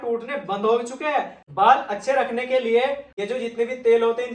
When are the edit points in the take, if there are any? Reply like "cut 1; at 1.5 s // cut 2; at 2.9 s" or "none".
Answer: cut 1; at 1.4 s // cut 2; at 3.1 s